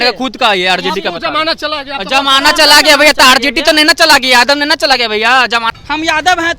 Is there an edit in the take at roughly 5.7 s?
yes; 1 cut; at 5.7 s

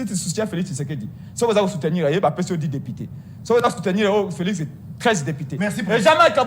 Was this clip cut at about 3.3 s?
no; 0 cuts

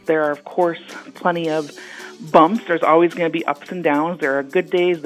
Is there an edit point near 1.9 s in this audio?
no; 0 cuts

